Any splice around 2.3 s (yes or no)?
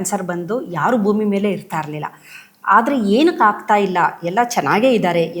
no